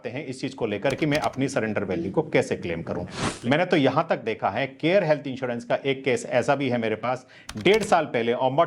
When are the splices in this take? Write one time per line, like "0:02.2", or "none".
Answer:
0:03.2